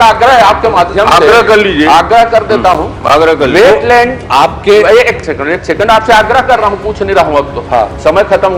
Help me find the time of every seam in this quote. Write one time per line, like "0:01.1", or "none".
none